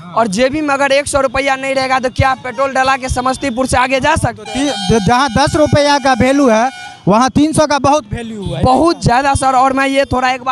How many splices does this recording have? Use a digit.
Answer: 0